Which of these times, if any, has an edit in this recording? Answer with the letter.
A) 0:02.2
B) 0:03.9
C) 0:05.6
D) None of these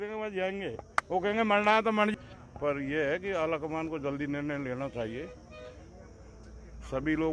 A